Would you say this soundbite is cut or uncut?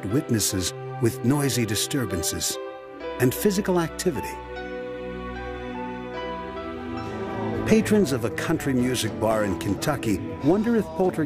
cut